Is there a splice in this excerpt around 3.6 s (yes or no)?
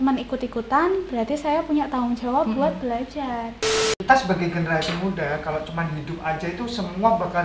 yes